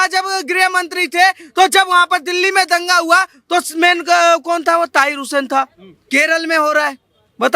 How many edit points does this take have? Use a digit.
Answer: 1